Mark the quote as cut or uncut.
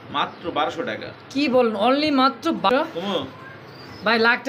cut